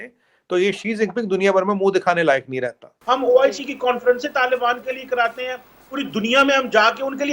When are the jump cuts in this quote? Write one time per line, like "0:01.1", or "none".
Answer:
0:02.9

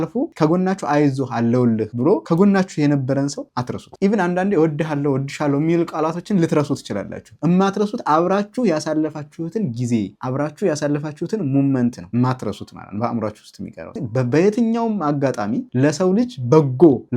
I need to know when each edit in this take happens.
0:14.0

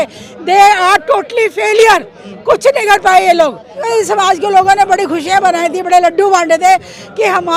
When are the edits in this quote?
0:03.9

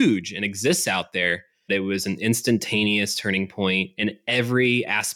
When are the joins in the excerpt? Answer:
0:01.6
0:03.9

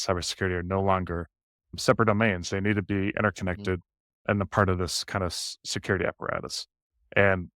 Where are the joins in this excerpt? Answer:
0:04.2

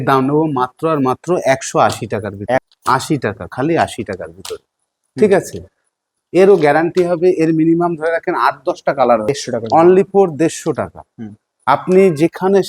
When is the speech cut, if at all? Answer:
0:02.7
0:09.2

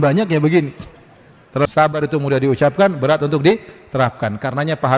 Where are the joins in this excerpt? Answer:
0:01.7

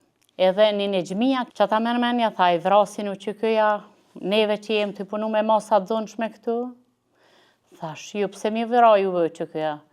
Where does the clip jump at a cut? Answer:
0:01.4

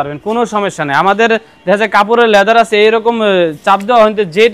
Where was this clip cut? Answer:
none

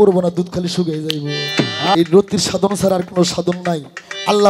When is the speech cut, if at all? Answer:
0:02.0

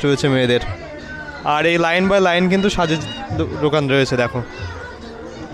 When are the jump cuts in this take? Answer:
none

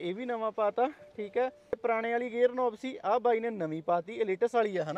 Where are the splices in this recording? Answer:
0:01.8

